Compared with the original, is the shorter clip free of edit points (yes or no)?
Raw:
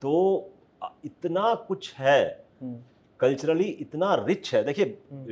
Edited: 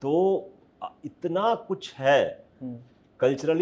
yes